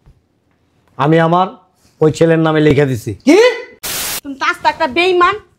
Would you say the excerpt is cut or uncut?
cut